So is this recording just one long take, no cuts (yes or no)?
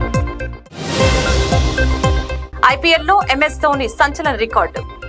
yes